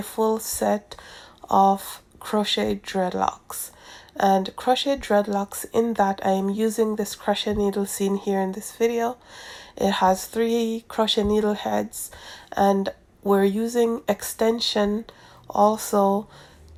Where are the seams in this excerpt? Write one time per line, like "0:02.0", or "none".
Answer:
none